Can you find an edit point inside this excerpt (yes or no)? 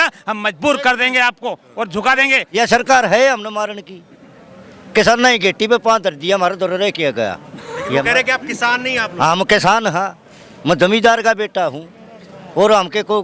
yes